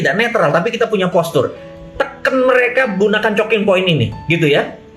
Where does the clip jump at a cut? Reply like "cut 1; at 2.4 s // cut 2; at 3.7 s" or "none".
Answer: cut 1; at 1.7 s